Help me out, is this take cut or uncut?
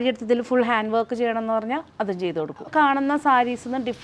cut